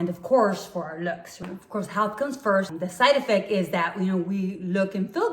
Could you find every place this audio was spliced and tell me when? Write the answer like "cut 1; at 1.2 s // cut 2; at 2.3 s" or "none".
cut 1; at 1.4 s // cut 2; at 2.7 s